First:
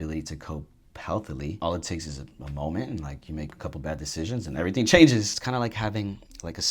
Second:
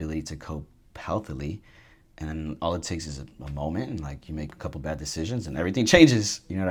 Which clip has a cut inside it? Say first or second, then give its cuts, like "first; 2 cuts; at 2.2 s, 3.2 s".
first; 2 cuts; at 1.6 s, 5.4 s